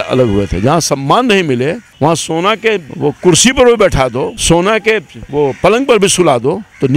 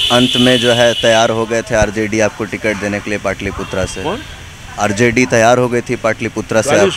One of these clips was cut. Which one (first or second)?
first